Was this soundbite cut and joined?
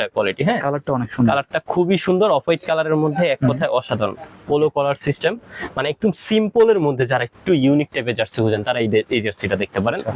no; 0 cuts

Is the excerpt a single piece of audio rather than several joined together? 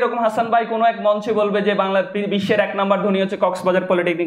yes; 0 cuts

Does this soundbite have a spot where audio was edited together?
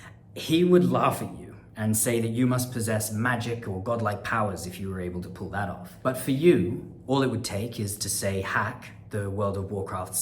yes; 2 cuts; at 5.9 s, 6.9 s

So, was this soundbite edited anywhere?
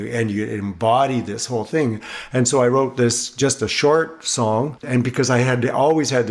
yes; 1 cut; at 4.9 s

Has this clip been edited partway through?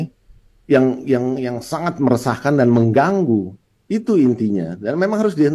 no; 0 cuts

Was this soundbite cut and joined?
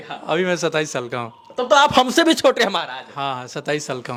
no; 0 cuts

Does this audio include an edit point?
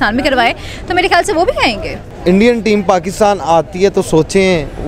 yes; 1 cut; at 1.9 s

